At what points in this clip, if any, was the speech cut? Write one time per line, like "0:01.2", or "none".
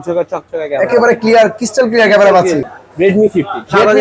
0:02.7